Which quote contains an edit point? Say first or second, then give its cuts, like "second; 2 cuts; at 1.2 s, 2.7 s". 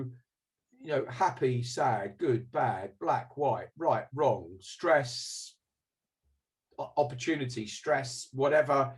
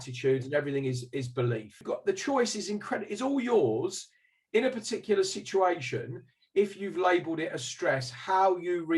second; 1 cut; at 1.8 s